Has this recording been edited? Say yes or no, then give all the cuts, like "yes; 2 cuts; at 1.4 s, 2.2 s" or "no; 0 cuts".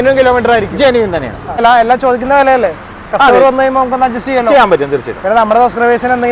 yes; 1 cut; at 1.6 s